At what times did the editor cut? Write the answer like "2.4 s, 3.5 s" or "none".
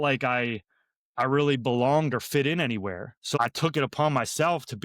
3.4 s